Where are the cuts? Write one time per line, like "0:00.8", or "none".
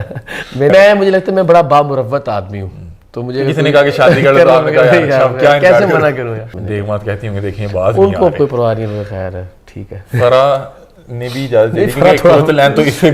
0:00.7
0:06.5